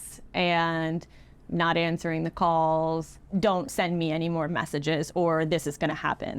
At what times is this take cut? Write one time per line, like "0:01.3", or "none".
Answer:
0:03.1